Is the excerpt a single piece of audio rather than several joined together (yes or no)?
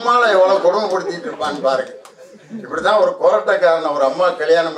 yes